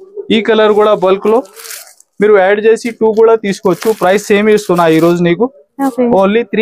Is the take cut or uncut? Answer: uncut